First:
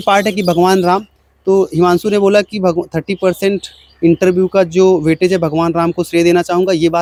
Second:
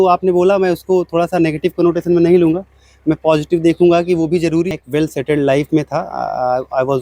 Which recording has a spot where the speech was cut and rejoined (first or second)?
second